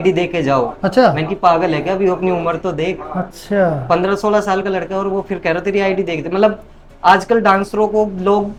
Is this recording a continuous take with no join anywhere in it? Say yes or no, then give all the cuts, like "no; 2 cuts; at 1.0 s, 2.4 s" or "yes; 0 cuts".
yes; 0 cuts